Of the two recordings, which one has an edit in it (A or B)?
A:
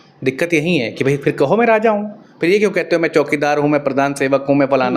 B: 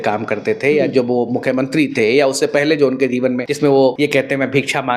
B